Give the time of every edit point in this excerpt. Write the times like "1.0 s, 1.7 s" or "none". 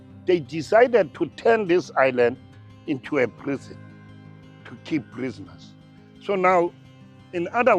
none